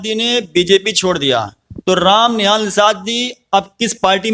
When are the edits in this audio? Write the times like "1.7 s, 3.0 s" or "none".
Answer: none

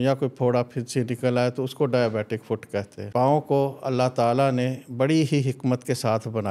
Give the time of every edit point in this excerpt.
3.0 s

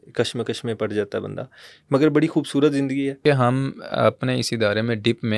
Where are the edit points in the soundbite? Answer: 3.1 s

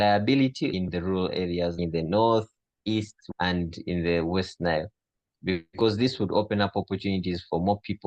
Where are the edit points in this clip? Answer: none

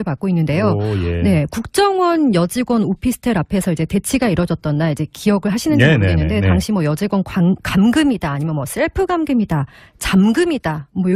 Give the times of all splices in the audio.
3.1 s

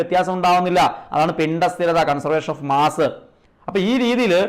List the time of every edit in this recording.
none

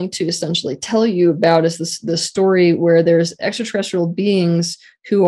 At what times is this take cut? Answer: none

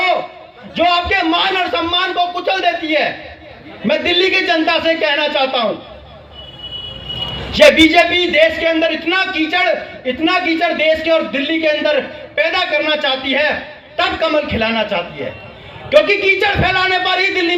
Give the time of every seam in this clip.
none

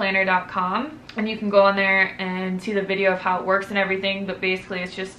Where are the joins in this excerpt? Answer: none

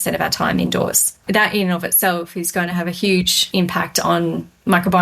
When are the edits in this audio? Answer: 1.2 s, 3.4 s

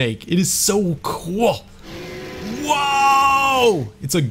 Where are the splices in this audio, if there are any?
1.9 s

